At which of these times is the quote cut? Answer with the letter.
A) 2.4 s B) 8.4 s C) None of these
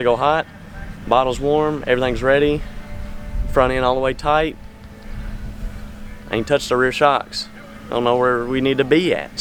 C